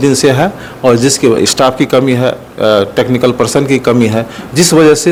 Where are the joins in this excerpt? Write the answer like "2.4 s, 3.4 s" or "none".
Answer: none